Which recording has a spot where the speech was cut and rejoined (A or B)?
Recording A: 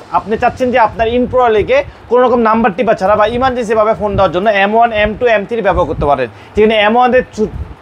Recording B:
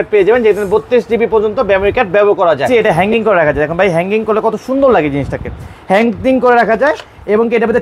B